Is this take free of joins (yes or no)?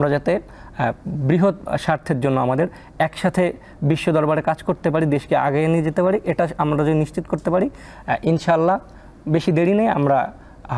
yes